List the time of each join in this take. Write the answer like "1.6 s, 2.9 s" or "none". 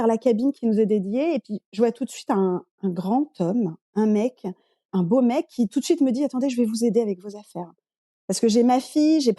none